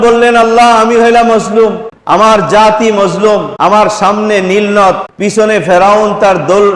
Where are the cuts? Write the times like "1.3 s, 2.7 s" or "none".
1.9 s, 3.5 s, 5.1 s